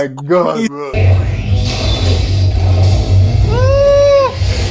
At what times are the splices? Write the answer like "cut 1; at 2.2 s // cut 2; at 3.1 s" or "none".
cut 1; at 1.0 s